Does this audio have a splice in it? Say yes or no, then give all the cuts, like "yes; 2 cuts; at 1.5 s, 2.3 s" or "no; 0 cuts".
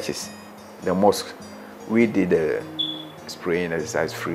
no; 0 cuts